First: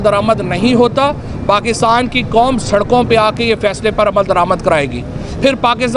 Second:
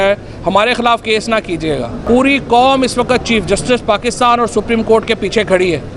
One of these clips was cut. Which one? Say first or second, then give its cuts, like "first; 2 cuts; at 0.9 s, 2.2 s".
second; 1 cut; at 1.9 s